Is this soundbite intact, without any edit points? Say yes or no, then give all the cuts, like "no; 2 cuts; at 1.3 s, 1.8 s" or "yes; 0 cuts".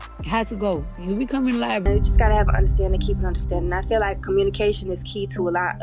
no; 1 cut; at 1.8 s